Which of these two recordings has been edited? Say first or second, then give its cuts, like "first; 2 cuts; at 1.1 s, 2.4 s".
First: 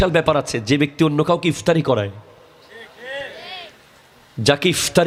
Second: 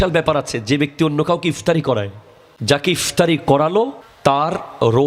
second; 2 cuts; at 1.8 s, 4.0 s